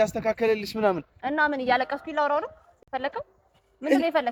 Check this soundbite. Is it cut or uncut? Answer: uncut